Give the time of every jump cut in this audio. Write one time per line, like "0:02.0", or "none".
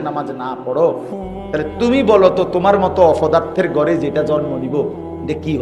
none